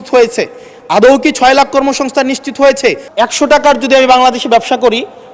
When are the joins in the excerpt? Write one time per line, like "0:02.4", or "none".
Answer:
0:03.0